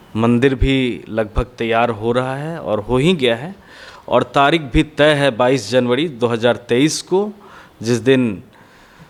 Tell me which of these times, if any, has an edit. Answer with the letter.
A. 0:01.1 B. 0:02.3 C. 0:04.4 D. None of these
D